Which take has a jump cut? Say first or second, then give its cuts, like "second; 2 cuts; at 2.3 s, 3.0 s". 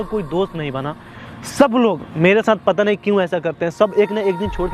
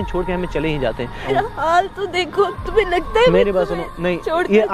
second; 1 cut; at 1.3 s